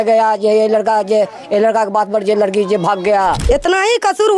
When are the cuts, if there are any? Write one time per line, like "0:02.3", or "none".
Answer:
0:03.4